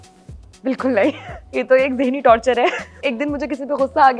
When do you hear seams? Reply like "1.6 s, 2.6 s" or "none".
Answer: 1.4 s, 3.0 s